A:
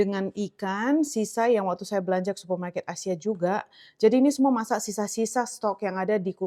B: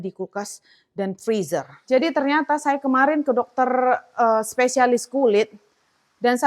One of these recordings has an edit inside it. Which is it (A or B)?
B